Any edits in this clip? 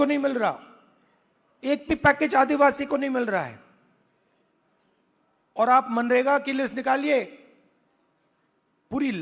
no; 0 cuts

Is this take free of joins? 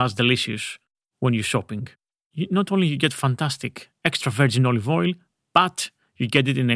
yes; 0 cuts

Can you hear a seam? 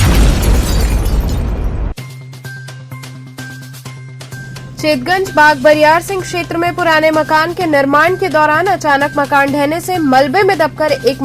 no; 0 cuts

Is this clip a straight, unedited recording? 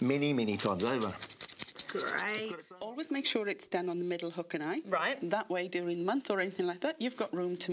no; 1 cut; at 2.5 s

